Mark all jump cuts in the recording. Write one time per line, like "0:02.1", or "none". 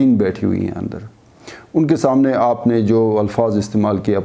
none